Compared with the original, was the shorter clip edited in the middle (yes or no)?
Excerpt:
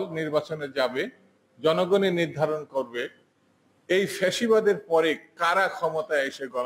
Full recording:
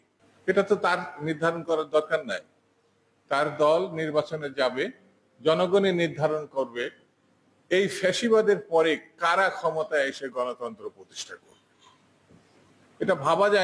no